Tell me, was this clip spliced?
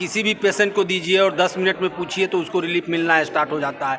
no; 0 cuts

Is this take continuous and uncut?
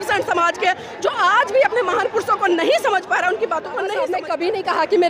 no; 1 cut; at 4.2 s

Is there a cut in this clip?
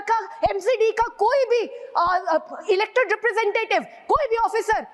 no; 0 cuts

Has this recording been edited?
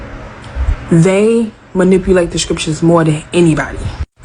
yes; 1 cut; at 2.0 s

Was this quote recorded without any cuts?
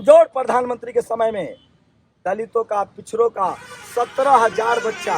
yes; 0 cuts

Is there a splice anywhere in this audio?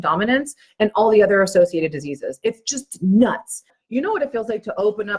yes; 1 cut; at 3.8 s

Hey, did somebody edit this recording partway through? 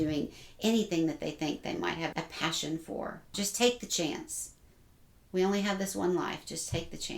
yes; 2 cuts; at 2.1 s, 3.3 s

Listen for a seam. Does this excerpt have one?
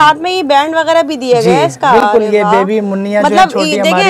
no; 0 cuts

